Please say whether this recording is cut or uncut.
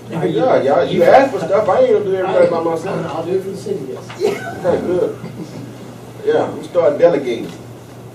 cut